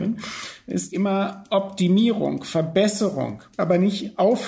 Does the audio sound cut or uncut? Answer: cut